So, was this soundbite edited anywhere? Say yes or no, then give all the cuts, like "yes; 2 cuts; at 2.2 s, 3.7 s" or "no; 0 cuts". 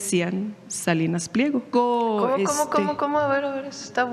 yes; 1 cut; at 1.7 s